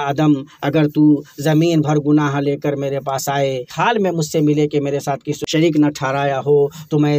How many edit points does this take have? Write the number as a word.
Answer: two